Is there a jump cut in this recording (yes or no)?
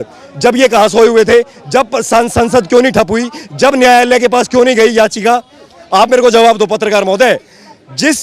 no